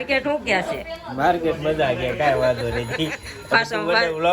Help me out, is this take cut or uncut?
uncut